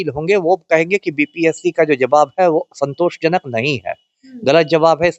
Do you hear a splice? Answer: no; 0 cuts

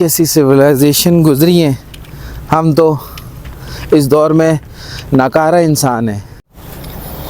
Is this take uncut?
no; 1 cut; at 6.3 s

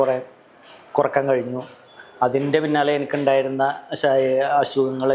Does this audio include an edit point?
no; 0 cuts

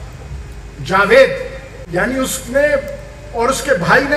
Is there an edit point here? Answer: yes; 1 cut; at 1.7 s

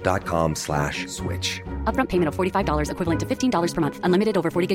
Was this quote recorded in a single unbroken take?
yes; 0 cuts

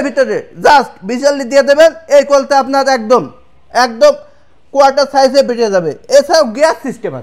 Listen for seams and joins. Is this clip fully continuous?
yes; 0 cuts

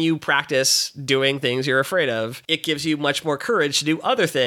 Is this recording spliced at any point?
yes; 1 cut; at 2.4 s

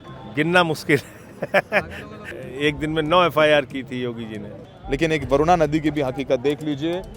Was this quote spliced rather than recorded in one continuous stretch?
yes; 2 cuts; at 2.3 s, 4.6 s

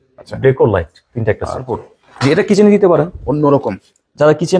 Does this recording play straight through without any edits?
no; 1 cut; at 1.8 s

